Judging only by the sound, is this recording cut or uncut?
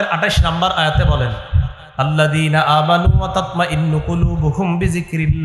uncut